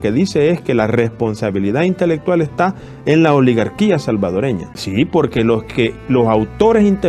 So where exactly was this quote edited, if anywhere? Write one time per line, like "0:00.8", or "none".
0:04.7